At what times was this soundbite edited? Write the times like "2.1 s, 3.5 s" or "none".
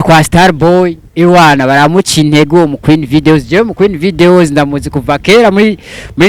1.0 s